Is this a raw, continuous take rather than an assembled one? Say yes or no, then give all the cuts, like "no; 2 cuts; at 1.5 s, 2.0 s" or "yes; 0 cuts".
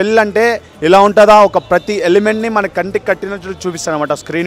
yes; 0 cuts